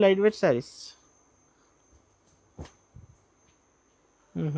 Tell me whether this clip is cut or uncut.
uncut